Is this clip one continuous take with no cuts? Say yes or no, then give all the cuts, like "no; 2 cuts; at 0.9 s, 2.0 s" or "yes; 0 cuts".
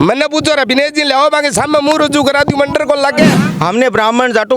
no; 1 cut; at 3.4 s